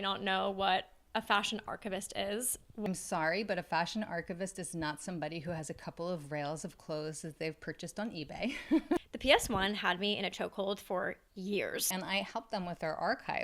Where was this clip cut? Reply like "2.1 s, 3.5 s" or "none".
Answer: 2.9 s, 9.0 s, 11.9 s